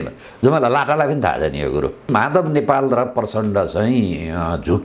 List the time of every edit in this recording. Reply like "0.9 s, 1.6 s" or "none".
2.1 s